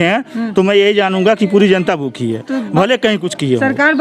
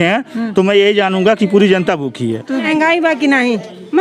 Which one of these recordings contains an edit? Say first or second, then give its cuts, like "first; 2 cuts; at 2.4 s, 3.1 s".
second; 1 cut; at 2.7 s